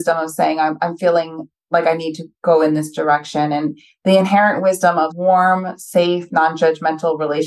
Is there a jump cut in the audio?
yes; 1 cut; at 5.1 s

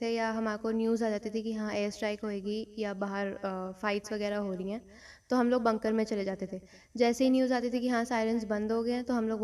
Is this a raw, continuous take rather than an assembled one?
yes; 0 cuts

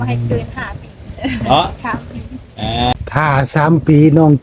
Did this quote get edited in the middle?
yes; 1 cut; at 2.9 s

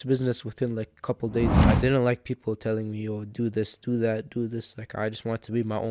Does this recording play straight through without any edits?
no; 1 cut; at 1.6 s

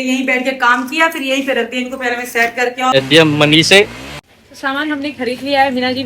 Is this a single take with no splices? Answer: no; 1 cut; at 2.9 s

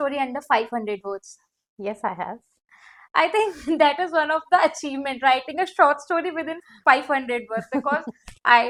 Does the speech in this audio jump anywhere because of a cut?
no; 0 cuts

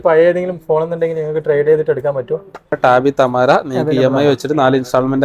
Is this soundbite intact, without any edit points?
no; 1 cut; at 2.7 s

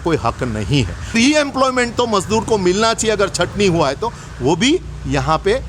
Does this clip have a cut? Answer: yes; 1 cut; at 1.1 s

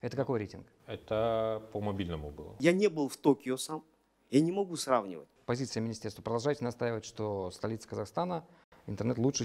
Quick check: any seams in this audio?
yes; 2 cuts; at 2.5 s, 5.3 s

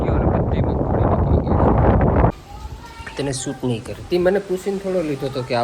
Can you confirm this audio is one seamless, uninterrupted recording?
no; 1 cut; at 2.3 s

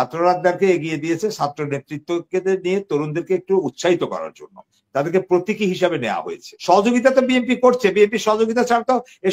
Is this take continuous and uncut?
no; 1 cut; at 6.5 s

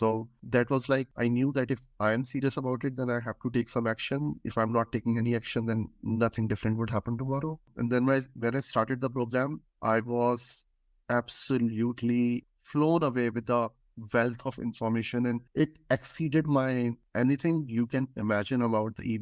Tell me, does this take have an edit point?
no; 0 cuts

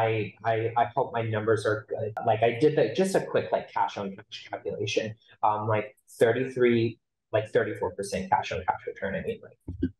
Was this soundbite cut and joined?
yes; 1 cut; at 2.1 s

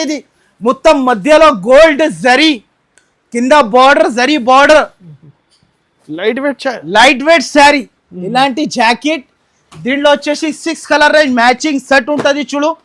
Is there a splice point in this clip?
no; 0 cuts

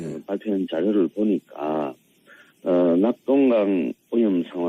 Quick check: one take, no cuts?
yes; 0 cuts

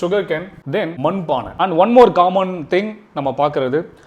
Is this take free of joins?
no; 1 cut; at 0.9 s

